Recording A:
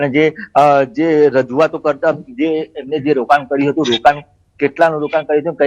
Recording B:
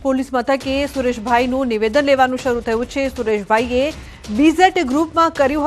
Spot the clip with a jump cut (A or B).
A